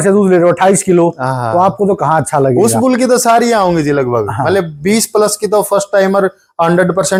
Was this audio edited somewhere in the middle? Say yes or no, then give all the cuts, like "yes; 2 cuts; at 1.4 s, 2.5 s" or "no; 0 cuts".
no; 0 cuts